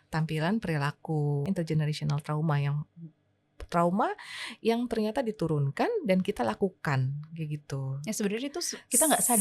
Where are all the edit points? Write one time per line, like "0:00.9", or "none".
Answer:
0:01.4